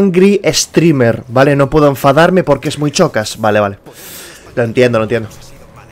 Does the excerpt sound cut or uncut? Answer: uncut